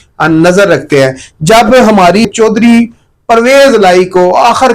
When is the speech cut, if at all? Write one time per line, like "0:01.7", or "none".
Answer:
0:02.2